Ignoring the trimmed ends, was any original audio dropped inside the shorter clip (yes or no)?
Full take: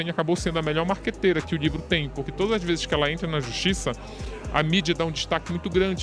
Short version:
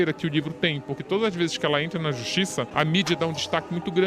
yes